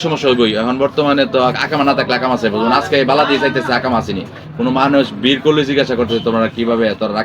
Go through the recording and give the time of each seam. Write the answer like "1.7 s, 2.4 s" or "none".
none